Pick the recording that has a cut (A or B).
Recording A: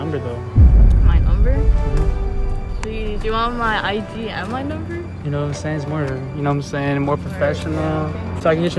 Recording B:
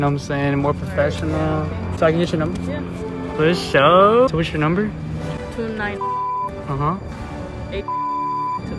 B